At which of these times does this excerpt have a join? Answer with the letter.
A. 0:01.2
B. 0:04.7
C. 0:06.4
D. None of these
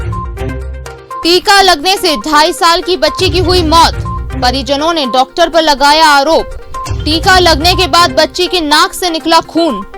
A